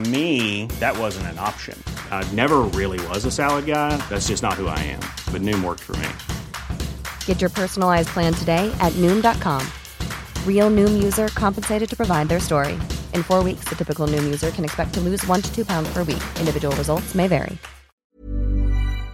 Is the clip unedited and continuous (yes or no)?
no